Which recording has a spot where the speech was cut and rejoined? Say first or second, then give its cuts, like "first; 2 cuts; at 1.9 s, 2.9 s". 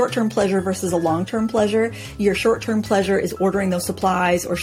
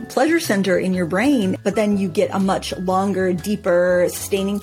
second; 1 cut; at 1.6 s